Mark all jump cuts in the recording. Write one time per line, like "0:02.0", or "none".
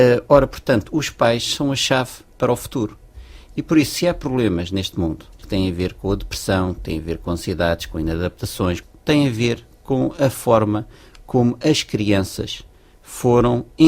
0:05.4
0:08.8